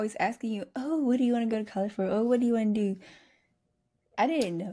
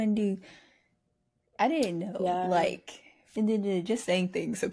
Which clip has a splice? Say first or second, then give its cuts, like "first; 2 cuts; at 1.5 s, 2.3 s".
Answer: second; 1 cut; at 3.2 s